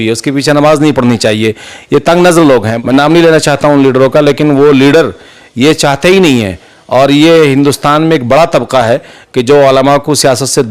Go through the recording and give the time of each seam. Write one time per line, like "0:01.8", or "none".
0:02.7